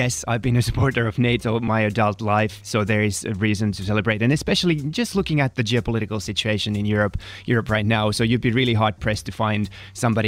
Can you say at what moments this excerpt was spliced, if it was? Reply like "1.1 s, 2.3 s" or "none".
1.6 s, 2.6 s